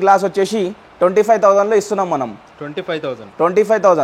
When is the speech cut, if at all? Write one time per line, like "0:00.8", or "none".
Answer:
none